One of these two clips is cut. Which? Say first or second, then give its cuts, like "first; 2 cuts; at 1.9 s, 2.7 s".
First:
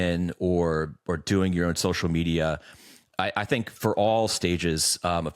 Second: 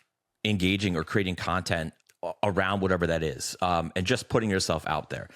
second; 1 cut; at 1.9 s